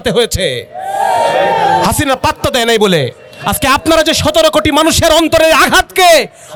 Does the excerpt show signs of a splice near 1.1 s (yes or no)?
no